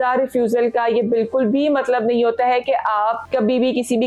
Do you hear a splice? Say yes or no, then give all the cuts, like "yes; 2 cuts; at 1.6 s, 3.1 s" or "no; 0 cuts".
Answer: no; 0 cuts